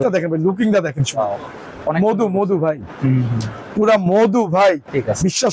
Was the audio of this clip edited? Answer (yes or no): no